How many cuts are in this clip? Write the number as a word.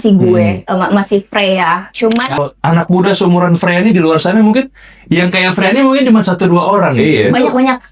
one